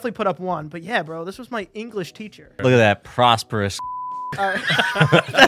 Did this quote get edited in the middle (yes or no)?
yes